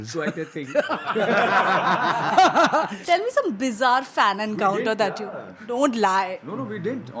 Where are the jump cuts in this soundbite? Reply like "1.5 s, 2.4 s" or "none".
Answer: 3.0 s